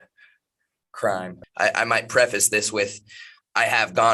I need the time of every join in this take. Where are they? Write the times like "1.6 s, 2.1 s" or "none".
1.4 s